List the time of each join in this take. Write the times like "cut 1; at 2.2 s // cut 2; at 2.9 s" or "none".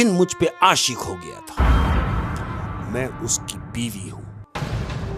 cut 1; at 2.7 s